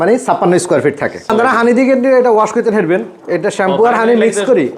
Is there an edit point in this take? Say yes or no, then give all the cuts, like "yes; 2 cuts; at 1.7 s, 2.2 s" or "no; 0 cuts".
yes; 1 cut; at 1.3 s